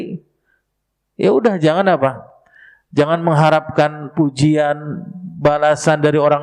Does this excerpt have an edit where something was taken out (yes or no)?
no